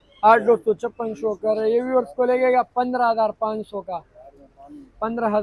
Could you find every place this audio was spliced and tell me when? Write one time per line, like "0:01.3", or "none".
none